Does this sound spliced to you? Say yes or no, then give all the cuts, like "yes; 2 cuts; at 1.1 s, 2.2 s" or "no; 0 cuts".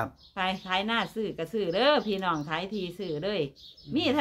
no; 0 cuts